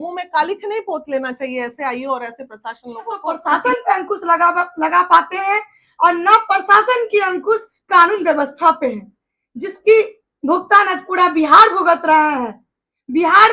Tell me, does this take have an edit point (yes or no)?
yes